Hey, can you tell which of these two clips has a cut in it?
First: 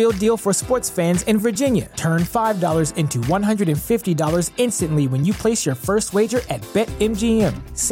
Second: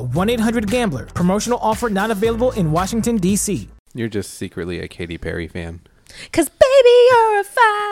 second; 1 cut; at 3.7 s

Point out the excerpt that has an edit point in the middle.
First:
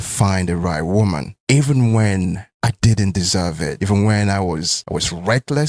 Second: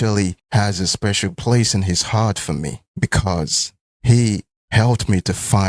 first; 4 cuts; at 1.3 s, 2.5 s, 3.8 s, 4.8 s

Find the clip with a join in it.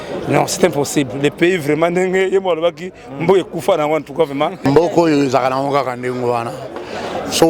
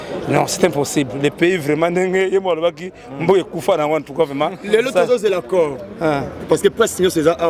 first; 1 cut; at 4.7 s

